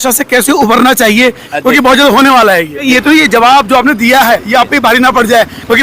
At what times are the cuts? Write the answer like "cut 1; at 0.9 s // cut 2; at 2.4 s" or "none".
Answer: cut 1; at 1.5 s // cut 2; at 2.8 s

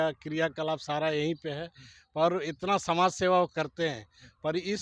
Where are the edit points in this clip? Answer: none

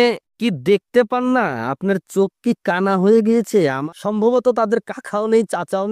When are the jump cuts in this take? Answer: cut 1; at 3.9 s

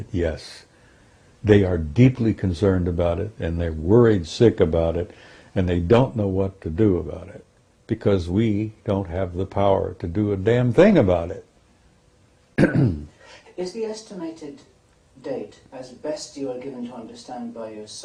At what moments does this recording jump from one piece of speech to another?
none

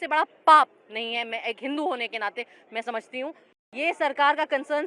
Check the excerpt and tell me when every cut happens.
cut 1; at 3.5 s

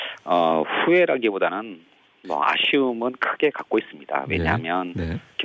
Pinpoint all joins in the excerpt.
cut 1; at 2.7 s

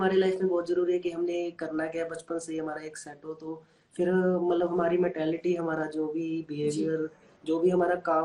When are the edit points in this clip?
none

